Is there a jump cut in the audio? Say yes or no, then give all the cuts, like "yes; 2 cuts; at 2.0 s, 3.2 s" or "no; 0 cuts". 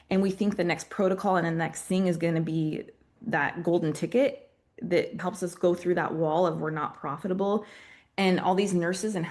yes; 2 cuts; at 3.1 s, 5.2 s